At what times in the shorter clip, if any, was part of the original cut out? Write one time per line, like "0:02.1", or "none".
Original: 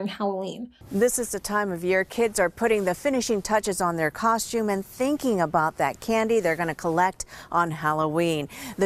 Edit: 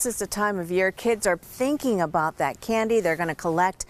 0:01.4